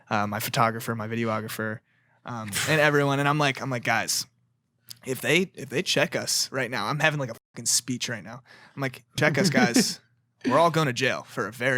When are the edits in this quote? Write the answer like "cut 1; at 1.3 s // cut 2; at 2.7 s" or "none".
cut 1; at 9.2 s